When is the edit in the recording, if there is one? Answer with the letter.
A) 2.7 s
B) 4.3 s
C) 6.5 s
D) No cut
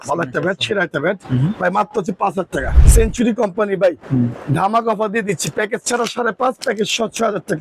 A